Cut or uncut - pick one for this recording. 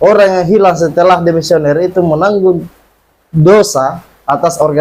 uncut